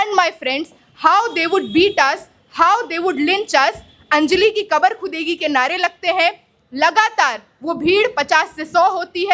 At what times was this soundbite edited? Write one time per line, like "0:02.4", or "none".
none